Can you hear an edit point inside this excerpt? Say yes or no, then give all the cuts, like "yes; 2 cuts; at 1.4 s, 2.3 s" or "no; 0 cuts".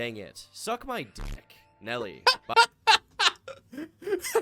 no; 0 cuts